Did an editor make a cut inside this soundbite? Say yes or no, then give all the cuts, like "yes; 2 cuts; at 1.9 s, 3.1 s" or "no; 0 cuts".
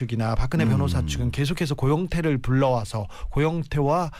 yes; 1 cut; at 2.7 s